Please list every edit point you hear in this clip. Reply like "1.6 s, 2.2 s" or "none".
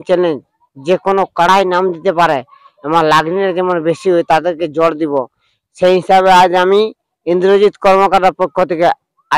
none